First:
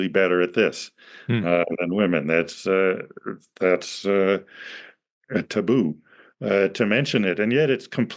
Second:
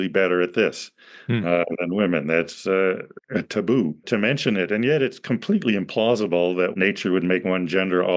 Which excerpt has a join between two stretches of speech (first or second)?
second